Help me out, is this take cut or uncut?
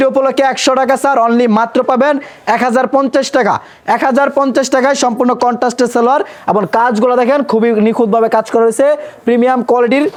uncut